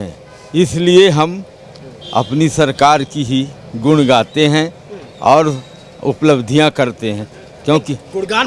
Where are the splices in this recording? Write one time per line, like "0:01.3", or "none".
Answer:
none